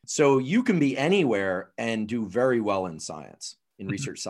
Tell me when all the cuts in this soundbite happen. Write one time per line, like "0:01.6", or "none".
none